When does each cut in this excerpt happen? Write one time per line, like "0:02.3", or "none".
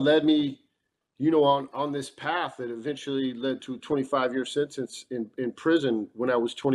none